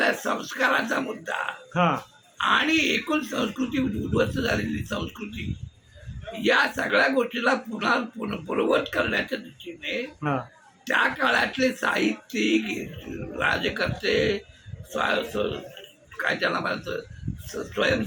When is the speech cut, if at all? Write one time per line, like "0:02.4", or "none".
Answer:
none